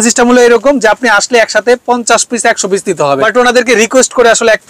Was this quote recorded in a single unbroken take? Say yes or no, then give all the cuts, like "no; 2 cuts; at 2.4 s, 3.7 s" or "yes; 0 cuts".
no; 1 cut; at 3.2 s